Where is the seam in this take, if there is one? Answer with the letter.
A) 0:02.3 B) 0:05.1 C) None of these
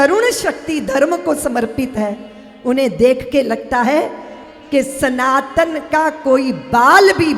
C